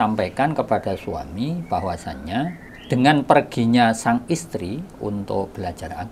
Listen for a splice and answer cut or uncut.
cut